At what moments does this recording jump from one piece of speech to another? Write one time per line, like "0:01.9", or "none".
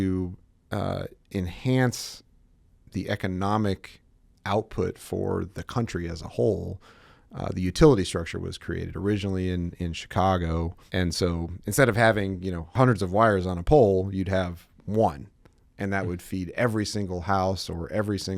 0:10.8
0:12.7